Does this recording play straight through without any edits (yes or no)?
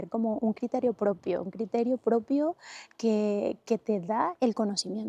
yes